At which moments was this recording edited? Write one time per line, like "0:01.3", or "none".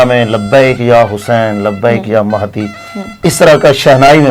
none